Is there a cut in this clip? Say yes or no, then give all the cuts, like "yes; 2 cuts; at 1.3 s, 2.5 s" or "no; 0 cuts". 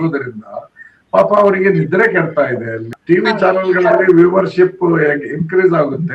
yes; 1 cut; at 2.9 s